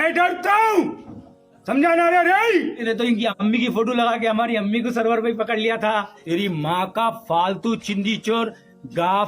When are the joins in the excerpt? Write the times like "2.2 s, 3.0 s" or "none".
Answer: 2.8 s, 6.1 s